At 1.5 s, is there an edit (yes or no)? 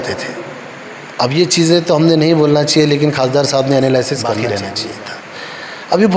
no